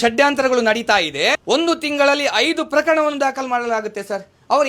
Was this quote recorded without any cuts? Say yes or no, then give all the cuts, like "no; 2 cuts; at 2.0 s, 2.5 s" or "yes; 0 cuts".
no; 1 cut; at 1.3 s